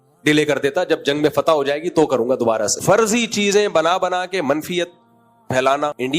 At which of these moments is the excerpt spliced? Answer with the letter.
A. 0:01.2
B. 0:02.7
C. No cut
B